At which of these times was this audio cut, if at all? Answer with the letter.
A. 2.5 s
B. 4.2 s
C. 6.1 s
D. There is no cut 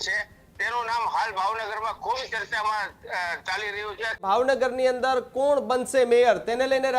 B